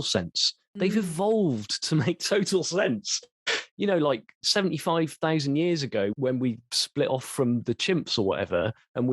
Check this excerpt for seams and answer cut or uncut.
cut